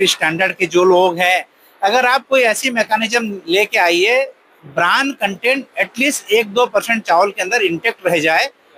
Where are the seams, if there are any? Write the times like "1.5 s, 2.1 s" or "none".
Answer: none